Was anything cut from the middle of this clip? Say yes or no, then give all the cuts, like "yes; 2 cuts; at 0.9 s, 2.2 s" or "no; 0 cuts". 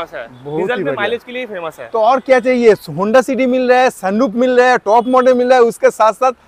no; 0 cuts